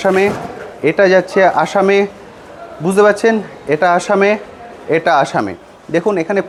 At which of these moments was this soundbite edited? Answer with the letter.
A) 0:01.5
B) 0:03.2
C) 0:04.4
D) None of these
D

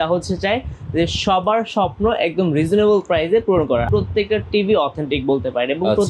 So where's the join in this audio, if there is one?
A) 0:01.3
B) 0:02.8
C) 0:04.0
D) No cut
C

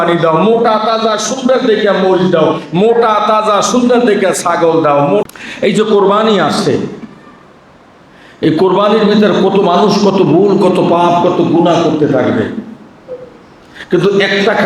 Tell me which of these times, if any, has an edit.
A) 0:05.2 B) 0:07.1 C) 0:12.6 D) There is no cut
A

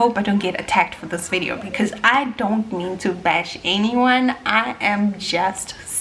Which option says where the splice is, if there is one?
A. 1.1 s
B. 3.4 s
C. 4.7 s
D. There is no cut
D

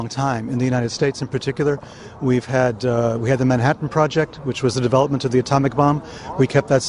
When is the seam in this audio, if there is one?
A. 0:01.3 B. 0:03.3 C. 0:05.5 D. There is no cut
D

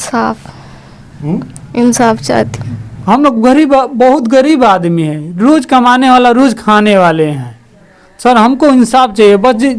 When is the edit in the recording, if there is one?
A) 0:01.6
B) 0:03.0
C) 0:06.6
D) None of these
B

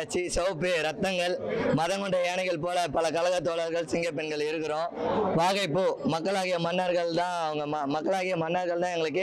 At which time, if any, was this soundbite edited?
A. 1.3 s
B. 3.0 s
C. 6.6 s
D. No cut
D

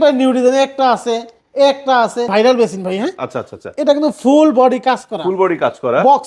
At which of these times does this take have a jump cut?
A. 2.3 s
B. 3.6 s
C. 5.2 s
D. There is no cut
A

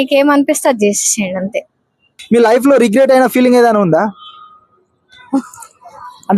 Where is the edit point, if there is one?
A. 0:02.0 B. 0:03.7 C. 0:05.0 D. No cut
A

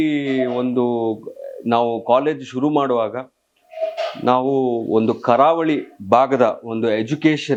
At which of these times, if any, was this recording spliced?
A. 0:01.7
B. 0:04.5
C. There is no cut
C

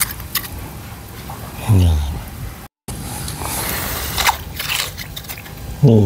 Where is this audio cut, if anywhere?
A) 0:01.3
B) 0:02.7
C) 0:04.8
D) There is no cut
D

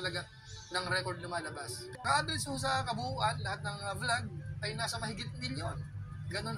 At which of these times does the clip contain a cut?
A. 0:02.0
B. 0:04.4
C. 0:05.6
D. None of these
A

